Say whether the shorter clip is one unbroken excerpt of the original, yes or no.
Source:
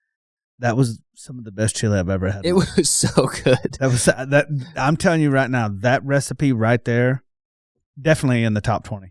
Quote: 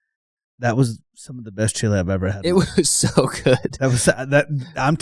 yes